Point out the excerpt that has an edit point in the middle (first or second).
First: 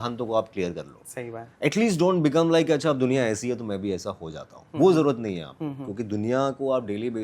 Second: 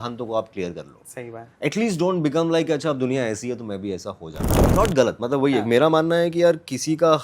second